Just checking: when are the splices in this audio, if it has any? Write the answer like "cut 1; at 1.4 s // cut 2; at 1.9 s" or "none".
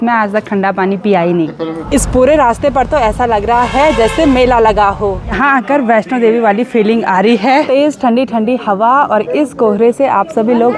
cut 1; at 1.7 s // cut 2; at 5.2 s // cut 3; at 7.7 s